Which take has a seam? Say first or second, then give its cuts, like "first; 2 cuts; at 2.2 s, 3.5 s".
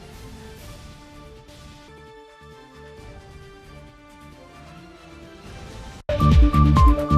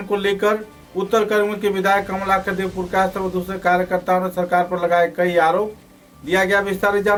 first; 1 cut; at 6.0 s